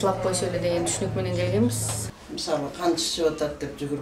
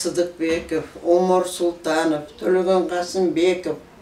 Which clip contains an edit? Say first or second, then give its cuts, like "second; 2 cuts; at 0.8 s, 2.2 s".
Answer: first; 1 cut; at 1.9 s